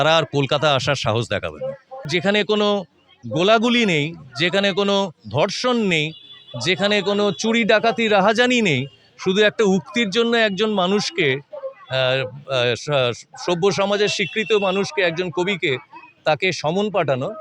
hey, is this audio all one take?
no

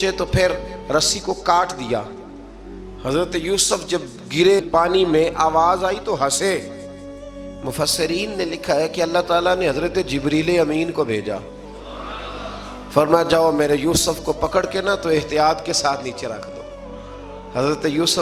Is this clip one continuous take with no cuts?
yes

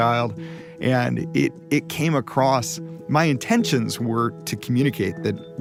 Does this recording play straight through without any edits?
yes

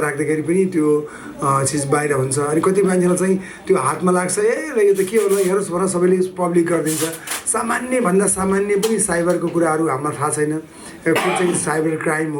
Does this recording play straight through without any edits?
yes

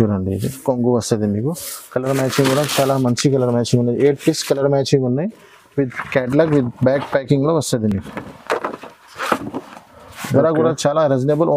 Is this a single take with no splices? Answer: yes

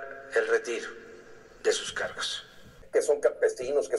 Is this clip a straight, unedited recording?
no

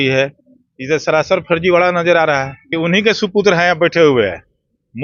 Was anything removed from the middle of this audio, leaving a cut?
yes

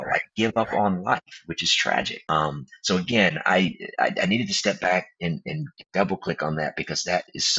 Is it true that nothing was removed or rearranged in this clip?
no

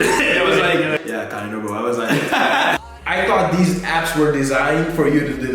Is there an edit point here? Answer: yes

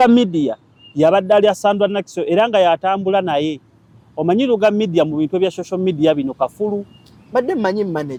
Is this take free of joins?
yes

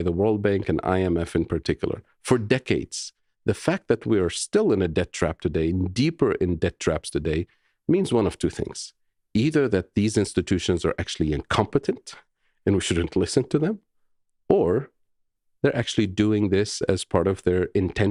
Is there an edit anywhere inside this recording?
no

